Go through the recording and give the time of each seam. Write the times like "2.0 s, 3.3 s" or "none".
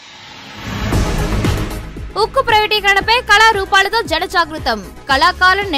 1.6 s